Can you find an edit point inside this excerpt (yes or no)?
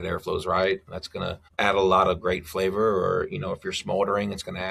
yes